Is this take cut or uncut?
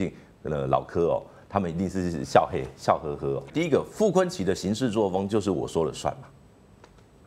cut